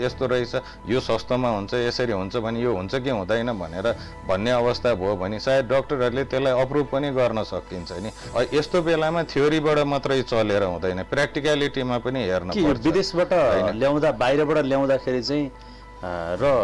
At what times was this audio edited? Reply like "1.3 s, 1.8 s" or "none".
8.3 s